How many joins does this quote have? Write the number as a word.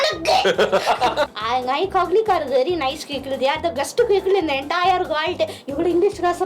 one